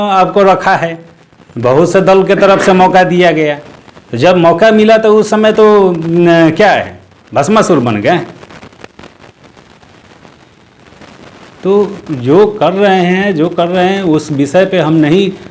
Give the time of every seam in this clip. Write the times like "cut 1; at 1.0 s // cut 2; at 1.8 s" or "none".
none